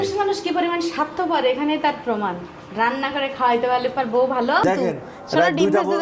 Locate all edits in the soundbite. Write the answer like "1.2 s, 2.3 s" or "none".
4.6 s